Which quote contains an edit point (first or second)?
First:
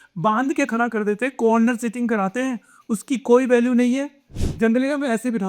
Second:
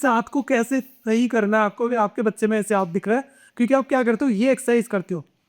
first